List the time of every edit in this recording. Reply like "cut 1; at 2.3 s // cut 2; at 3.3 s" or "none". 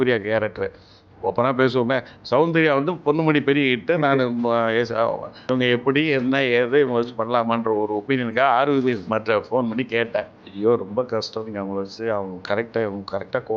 cut 1; at 1.0 s // cut 2; at 5.4 s // cut 3; at 10.4 s